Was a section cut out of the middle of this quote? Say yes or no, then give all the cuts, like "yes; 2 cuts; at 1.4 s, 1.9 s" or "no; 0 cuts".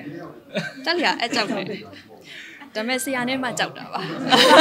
no; 0 cuts